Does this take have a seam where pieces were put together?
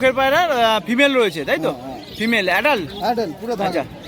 no; 0 cuts

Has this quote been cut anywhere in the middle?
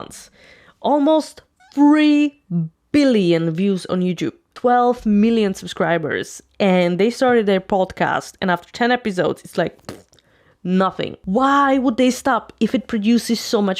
yes; 2 cuts; at 4.5 s, 11.2 s

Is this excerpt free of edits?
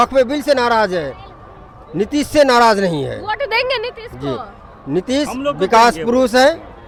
yes; 0 cuts

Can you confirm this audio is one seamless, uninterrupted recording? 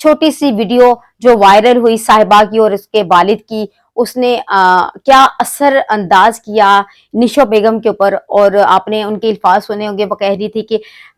yes; 0 cuts

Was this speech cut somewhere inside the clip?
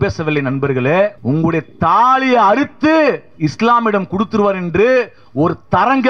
yes; 1 cut; at 1.2 s

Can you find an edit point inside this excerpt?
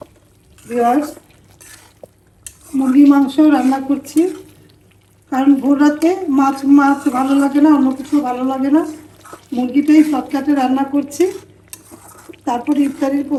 no; 0 cuts

